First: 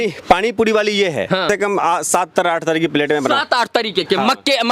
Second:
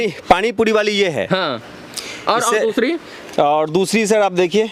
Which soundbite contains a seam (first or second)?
first